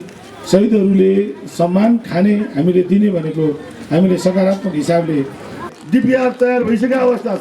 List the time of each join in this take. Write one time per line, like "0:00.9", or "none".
0:05.7